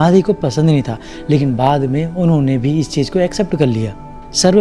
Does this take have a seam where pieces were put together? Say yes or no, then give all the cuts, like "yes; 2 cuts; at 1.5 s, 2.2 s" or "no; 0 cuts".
no; 0 cuts